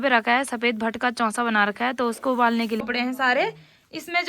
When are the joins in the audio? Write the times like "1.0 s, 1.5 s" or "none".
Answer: 2.8 s